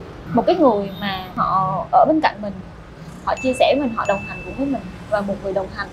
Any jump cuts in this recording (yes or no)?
no